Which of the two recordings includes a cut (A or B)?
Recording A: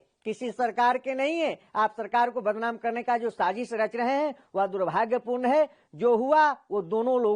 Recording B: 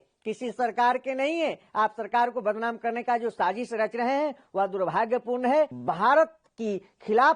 B